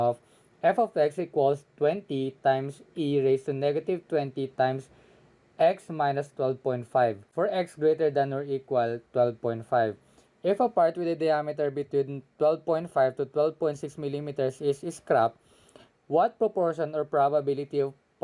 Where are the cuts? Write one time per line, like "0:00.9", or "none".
0:07.2

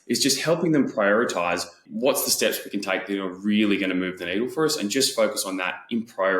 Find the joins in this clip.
0:01.8

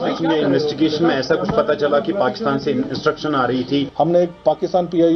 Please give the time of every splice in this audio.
0:03.9

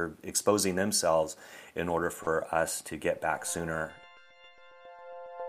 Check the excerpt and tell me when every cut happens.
0:04.0

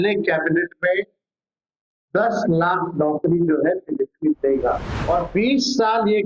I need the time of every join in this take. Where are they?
0:04.9

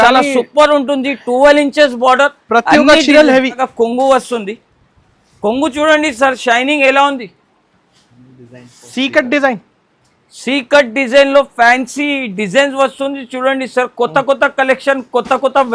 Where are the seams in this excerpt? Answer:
0:03.7

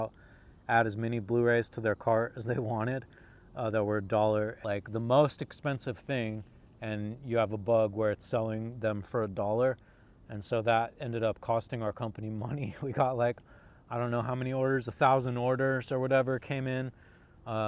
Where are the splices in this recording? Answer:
0:04.6

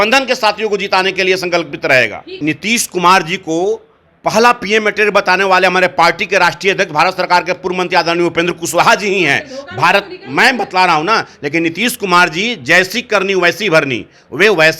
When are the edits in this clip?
0:02.3

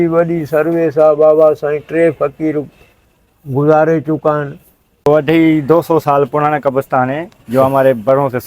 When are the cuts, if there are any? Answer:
0:05.1

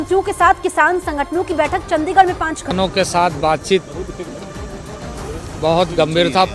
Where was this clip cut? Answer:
0:02.7

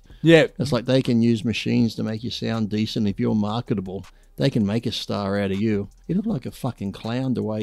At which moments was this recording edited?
0:05.9

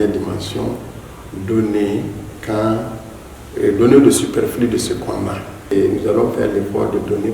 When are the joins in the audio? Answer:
0:05.7

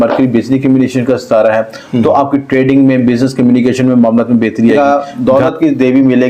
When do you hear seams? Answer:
0:04.8

